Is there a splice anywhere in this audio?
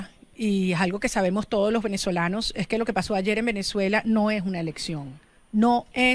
no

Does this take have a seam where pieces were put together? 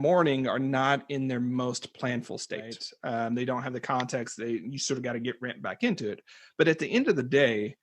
yes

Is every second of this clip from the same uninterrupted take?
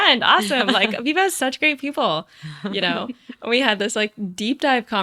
yes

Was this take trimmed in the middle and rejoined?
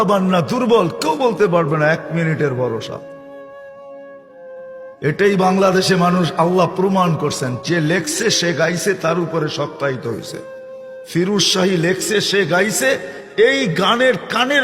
yes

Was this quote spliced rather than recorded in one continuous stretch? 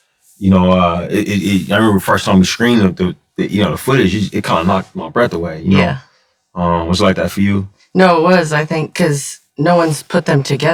no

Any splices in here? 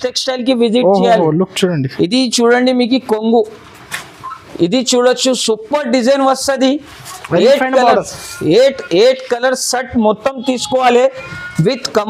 no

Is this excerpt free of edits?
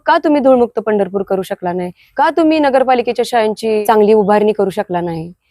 no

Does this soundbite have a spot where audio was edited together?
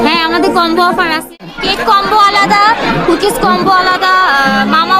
yes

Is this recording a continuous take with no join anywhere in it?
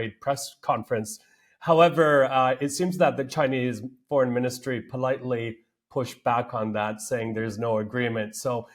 yes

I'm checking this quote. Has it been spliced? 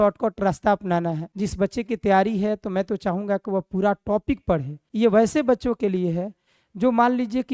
yes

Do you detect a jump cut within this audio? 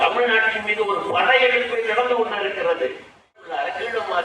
yes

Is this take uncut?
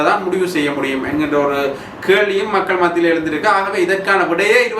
yes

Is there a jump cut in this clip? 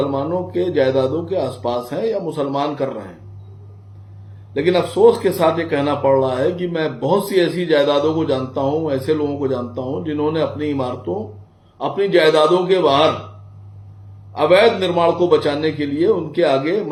no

